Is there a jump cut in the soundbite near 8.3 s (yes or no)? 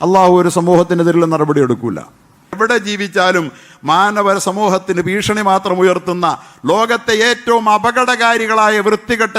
no